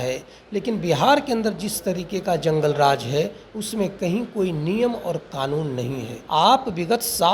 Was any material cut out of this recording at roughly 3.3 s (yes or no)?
no